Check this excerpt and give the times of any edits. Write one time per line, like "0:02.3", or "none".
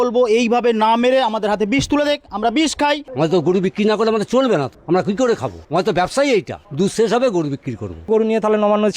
0:03.1
0:04.7
0:05.5
0:06.6
0:08.1